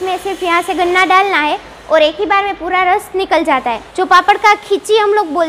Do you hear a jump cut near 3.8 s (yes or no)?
yes